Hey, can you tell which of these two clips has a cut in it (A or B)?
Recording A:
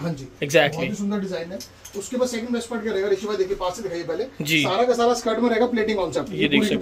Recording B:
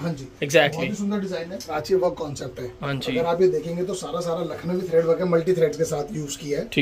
B